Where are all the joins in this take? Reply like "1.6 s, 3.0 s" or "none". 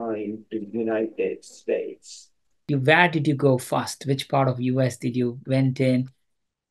2.7 s